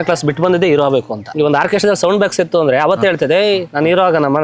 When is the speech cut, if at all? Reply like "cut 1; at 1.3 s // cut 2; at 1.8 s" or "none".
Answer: cut 1; at 1.2 s